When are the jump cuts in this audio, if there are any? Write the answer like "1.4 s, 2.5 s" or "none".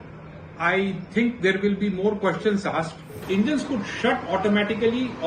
3.2 s